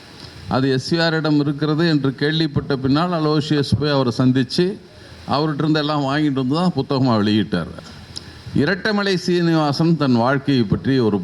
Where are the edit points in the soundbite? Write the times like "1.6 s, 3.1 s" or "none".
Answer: 7.7 s